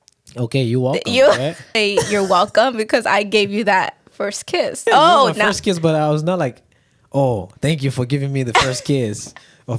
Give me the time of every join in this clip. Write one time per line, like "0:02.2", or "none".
0:01.8
0:04.8